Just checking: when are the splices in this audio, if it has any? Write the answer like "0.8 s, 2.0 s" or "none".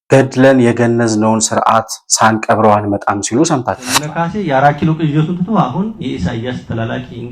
4.1 s